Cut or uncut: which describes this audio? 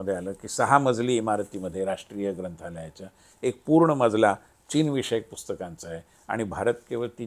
uncut